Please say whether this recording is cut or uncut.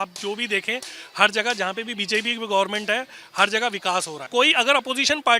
cut